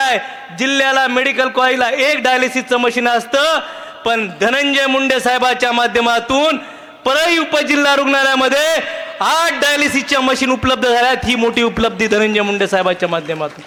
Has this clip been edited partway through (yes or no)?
no